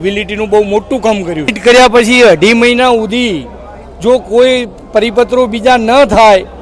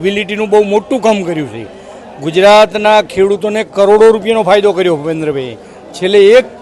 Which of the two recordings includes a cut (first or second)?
first